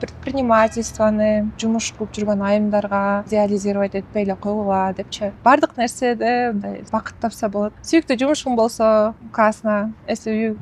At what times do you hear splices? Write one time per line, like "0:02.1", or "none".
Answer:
0:01.6
0:03.3
0:05.4
0:06.8
0:07.8
0:09.2